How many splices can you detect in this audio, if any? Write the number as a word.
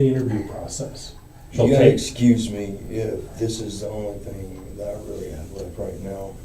one